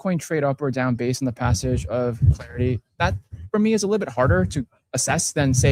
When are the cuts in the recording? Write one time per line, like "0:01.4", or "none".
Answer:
none